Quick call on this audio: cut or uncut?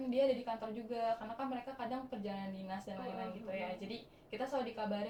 uncut